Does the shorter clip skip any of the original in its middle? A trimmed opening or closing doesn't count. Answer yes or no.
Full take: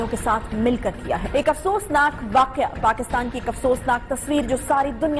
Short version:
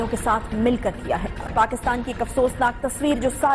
yes